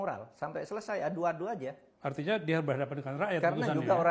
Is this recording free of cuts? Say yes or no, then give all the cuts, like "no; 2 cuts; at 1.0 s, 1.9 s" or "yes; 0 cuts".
no; 1 cut; at 1.9 s